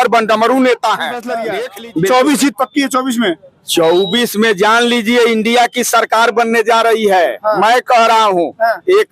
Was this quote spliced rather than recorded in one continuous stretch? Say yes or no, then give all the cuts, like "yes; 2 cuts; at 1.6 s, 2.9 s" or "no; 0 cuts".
yes; 1 cut; at 1.4 s